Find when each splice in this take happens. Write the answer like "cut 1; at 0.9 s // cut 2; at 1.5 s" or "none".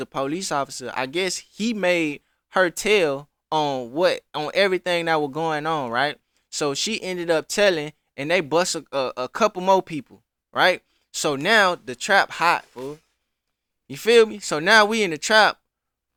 none

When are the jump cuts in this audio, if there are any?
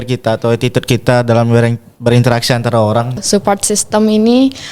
cut 1; at 3.2 s

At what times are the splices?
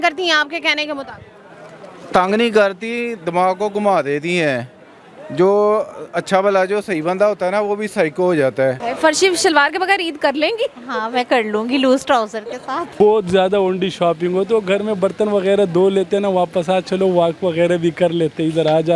cut 1; at 8.8 s // cut 2; at 13.0 s

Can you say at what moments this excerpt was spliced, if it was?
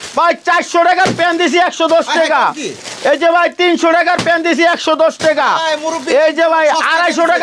none

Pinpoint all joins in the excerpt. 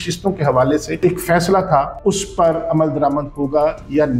cut 1; at 1.0 s // cut 2; at 1.9 s

